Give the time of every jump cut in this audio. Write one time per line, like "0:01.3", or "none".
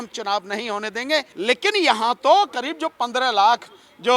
0:01.3